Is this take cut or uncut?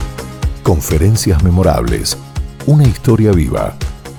uncut